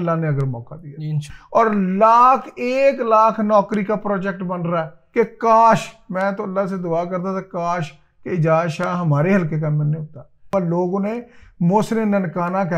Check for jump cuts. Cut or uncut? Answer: cut